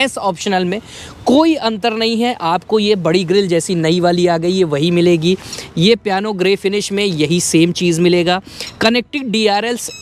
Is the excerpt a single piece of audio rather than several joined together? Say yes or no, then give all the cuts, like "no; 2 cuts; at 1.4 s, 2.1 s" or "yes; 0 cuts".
yes; 0 cuts